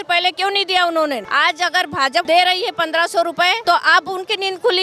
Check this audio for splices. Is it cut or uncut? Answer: cut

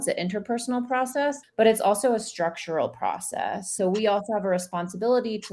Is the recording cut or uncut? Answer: cut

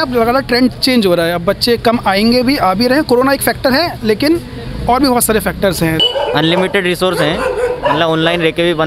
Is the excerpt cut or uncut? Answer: cut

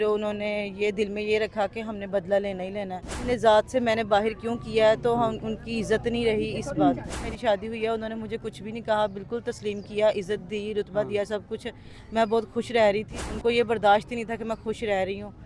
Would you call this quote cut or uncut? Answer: cut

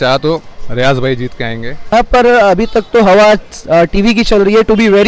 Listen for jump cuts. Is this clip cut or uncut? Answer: cut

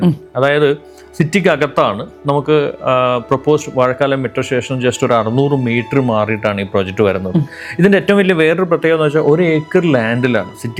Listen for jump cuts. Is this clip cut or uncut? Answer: uncut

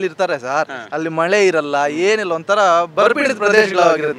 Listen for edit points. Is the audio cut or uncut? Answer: uncut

